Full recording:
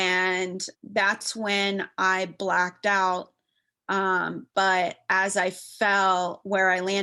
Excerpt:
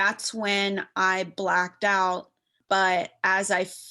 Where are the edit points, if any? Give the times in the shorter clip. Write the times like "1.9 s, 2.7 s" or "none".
2.5 s